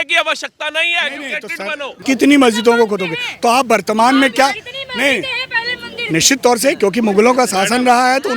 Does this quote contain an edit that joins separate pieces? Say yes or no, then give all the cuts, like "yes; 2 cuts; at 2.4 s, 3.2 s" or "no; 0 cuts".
yes; 1 cut; at 1.9 s